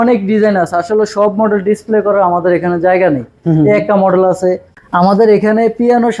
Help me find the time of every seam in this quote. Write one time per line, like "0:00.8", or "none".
0:04.7